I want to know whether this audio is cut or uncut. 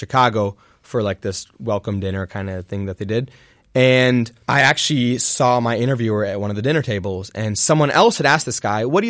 cut